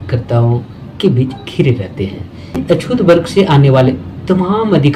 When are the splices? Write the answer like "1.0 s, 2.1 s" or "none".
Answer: 2.6 s